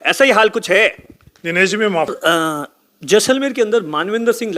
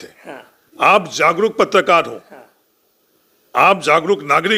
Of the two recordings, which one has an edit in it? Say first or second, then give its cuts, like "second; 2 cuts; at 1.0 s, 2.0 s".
first; 1 cut; at 2.1 s